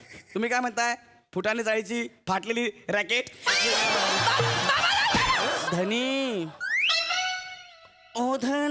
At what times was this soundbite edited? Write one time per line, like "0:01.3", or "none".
0:05.6